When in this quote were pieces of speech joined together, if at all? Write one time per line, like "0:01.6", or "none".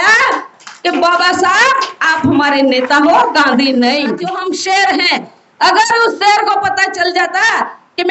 0:04.3